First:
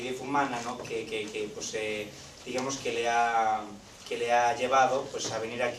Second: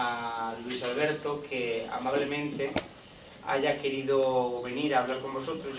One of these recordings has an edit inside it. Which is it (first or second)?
first